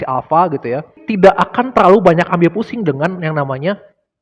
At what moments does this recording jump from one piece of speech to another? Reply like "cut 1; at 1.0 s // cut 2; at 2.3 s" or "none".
cut 1; at 1.0 s